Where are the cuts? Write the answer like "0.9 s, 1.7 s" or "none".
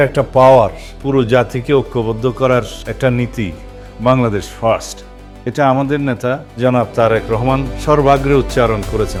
none